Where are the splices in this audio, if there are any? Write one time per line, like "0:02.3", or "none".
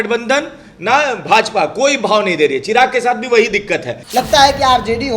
0:04.0